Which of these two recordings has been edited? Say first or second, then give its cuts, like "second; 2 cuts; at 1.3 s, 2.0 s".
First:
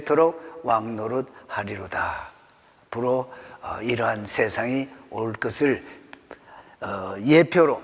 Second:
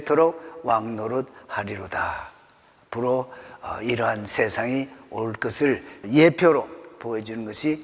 second; 1 cut; at 6.0 s